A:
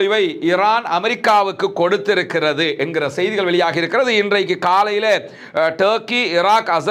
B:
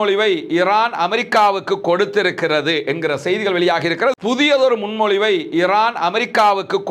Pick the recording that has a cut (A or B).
B